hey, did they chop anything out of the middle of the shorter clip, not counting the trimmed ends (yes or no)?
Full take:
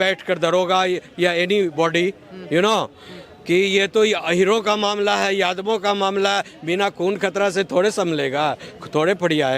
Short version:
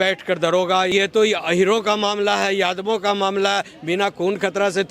yes